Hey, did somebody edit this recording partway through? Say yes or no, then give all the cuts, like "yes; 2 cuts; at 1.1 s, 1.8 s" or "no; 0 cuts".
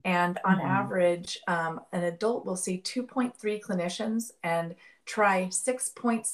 no; 0 cuts